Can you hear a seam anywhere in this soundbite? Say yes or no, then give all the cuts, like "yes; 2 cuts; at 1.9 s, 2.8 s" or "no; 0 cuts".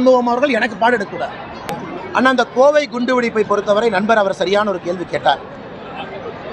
yes; 1 cut; at 1.6 s